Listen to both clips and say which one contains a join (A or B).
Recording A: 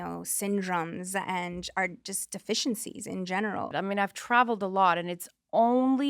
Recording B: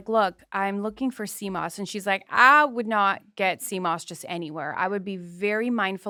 A